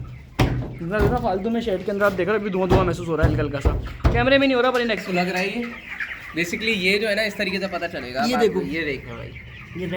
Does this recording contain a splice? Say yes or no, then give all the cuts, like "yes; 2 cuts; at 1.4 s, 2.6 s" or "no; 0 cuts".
yes; 1 cut; at 5.0 s